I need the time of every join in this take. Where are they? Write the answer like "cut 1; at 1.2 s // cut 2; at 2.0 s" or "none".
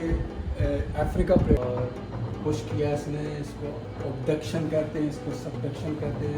cut 1; at 1.6 s